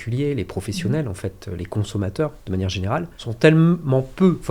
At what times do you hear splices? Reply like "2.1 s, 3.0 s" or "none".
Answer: 3.2 s